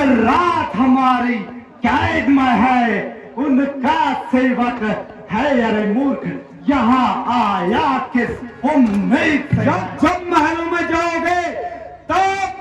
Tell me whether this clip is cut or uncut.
cut